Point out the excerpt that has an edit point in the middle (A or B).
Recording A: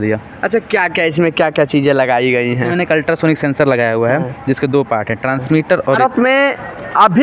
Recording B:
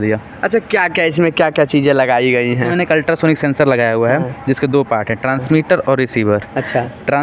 A